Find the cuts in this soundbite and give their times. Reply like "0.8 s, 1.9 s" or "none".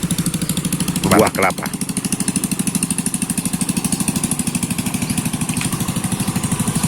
1.1 s